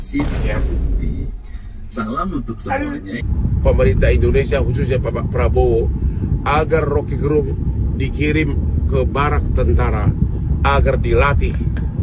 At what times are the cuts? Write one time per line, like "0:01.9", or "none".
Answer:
0:03.3

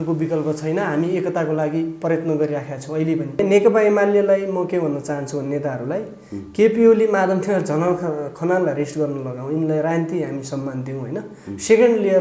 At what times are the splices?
0:03.4

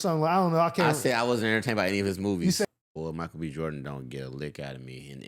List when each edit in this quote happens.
0:02.7

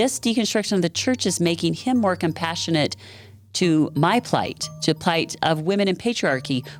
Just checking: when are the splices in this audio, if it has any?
none

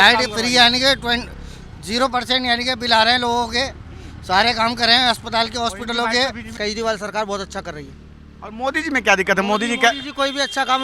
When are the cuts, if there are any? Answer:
0:06.6

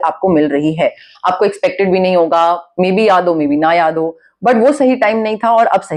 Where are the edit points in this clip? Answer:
none

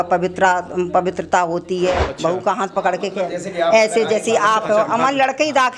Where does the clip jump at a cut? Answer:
0:02.1

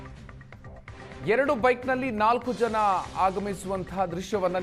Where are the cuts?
0:01.2

